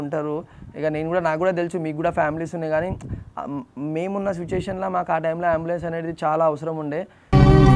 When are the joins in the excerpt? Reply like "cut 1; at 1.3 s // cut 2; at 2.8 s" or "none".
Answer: none